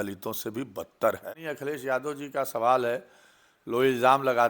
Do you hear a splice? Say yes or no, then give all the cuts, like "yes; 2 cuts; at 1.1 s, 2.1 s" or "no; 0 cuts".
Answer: yes; 1 cut; at 1.3 s